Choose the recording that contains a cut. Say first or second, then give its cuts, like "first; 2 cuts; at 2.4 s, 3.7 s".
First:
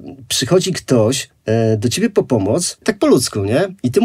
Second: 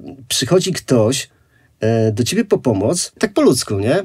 first; 1 cut; at 1.3 s